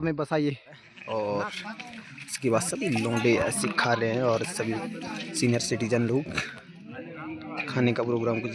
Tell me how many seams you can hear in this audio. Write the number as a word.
one